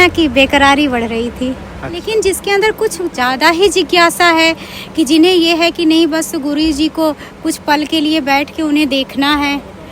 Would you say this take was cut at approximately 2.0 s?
yes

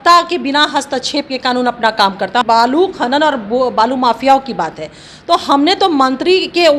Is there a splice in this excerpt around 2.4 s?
yes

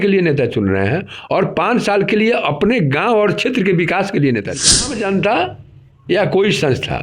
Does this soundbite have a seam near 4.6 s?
yes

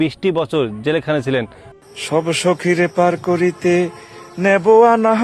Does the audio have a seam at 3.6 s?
no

